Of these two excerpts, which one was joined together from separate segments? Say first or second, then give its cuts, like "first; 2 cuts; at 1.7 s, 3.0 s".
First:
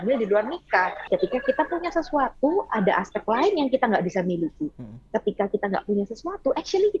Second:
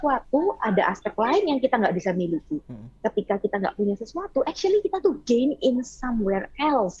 first; 1 cut; at 1.1 s